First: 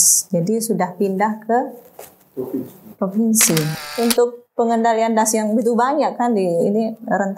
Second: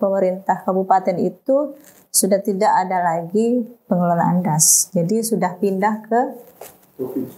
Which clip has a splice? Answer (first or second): first